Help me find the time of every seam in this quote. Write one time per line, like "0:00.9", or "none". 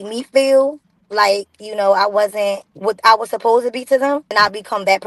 0:02.7
0:04.3